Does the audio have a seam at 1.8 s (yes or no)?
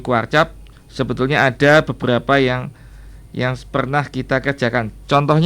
no